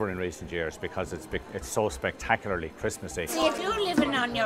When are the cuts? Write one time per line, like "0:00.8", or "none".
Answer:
0:03.3